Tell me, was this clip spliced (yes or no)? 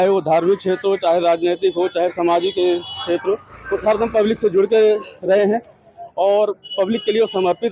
no